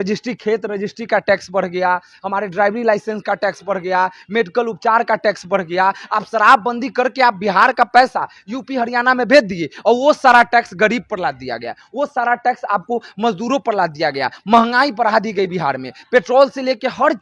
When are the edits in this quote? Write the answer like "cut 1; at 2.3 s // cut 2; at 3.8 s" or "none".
none